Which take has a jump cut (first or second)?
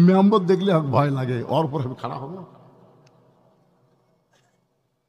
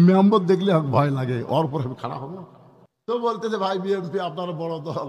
second